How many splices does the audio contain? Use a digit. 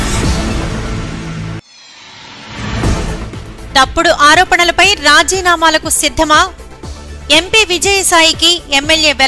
2